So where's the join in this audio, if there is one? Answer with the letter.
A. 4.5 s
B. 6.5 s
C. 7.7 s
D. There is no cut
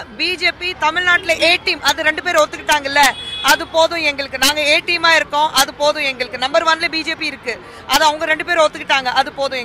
D